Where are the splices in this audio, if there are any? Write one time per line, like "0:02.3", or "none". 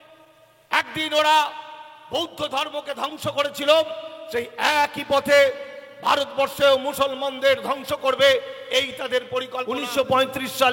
0:09.8